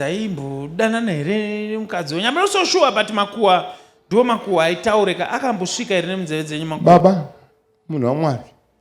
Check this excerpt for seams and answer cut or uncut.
cut